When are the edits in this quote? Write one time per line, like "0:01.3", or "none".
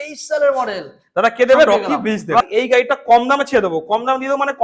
0:02.5

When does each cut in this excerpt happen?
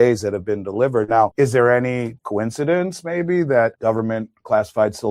0:01.3
0:02.2
0:03.8

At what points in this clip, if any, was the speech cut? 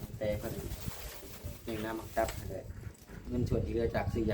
0:03.3

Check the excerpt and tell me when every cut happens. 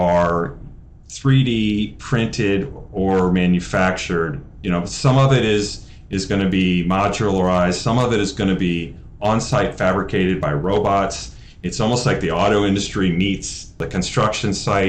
0:13.9

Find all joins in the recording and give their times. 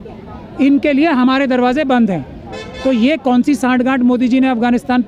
none

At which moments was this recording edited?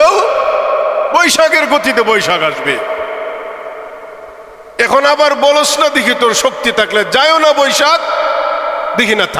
none

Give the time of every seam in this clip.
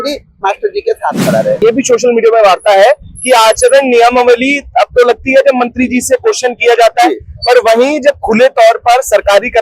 0:01.6

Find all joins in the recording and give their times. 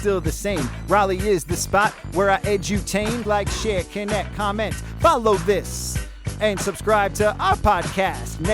0:03.2

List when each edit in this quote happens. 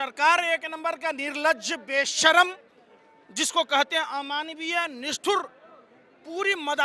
none

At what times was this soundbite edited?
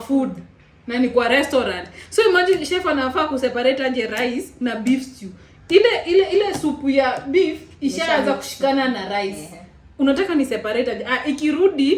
none

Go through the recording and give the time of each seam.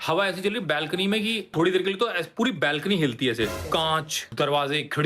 0:01.5
0:03.9

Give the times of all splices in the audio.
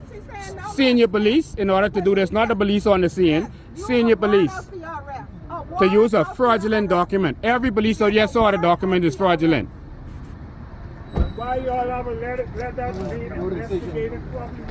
0:07.6

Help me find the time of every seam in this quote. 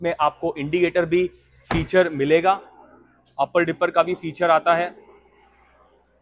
none

